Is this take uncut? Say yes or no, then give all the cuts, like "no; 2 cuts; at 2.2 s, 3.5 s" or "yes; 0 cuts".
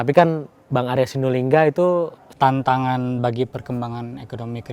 no; 1 cut; at 2.3 s